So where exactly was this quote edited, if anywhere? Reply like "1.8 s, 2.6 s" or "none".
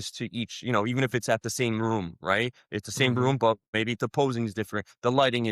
3.7 s